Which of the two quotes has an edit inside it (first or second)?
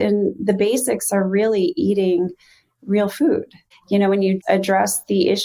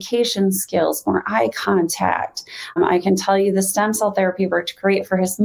first